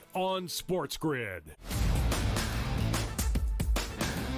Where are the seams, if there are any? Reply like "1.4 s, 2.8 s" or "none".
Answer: 1.8 s